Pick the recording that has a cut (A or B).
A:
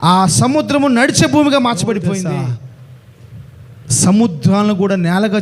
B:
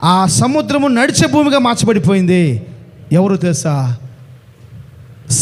A